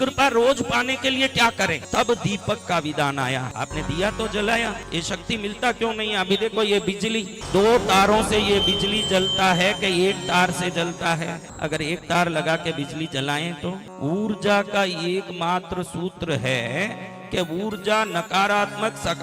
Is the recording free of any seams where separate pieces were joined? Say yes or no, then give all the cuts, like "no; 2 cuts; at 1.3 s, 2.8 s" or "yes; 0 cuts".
no; 6 cuts; at 1.8 s, 3.5 s, 4.8 s, 7.4 s, 11.5 s, 13.9 s